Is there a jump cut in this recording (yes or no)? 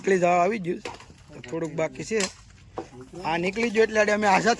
no